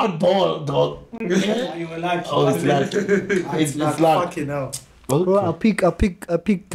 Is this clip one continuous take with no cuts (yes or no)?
yes